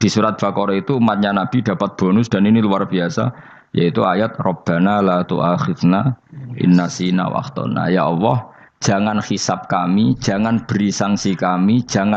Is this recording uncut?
yes; 0 cuts

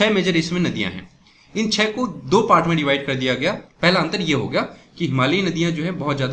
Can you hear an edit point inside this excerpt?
yes; 1 cut; at 3.7 s

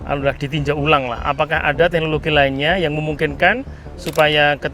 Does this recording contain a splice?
no; 0 cuts

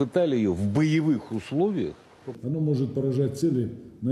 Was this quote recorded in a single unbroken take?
no; 1 cut; at 2.3 s

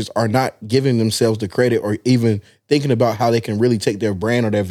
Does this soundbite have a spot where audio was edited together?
no; 0 cuts

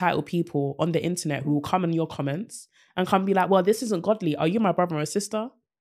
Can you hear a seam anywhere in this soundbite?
no; 0 cuts

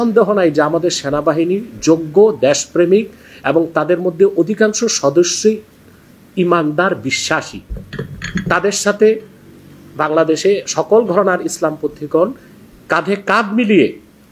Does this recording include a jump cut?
no; 0 cuts

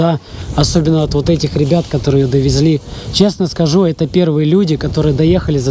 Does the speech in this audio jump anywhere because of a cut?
no; 0 cuts

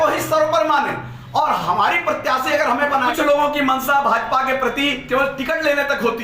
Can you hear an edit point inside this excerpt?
yes; 1 cut; at 3.1 s

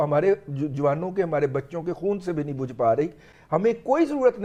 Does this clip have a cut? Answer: no; 0 cuts

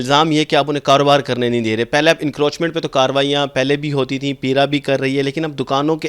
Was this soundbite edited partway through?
no; 0 cuts

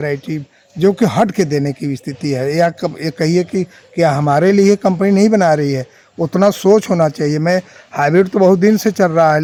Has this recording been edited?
no; 0 cuts

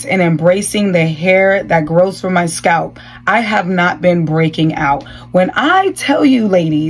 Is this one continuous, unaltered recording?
yes; 0 cuts

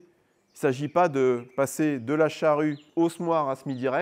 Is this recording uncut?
no; 1 cut; at 2.8 s

